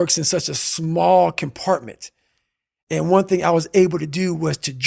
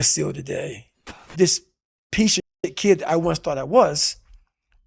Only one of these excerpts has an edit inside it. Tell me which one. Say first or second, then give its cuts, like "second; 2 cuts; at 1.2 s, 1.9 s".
second; 1 cut; at 1.2 s